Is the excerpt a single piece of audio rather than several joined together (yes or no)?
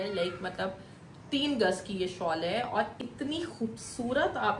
yes